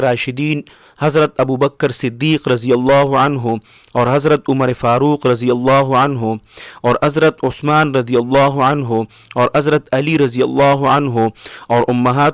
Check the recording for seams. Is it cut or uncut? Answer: uncut